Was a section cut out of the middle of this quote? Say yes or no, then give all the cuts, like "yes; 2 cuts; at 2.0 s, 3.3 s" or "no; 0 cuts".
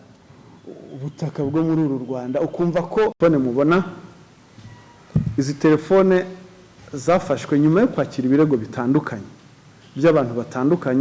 no; 0 cuts